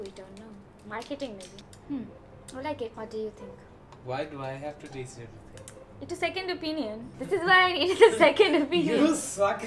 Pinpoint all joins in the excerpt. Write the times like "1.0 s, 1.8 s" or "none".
1.6 s, 7.1 s